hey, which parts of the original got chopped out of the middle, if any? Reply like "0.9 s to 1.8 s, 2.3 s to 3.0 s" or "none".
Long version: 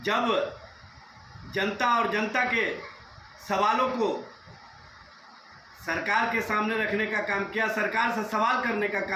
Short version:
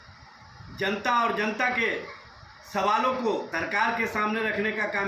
4.2 s to 5.8 s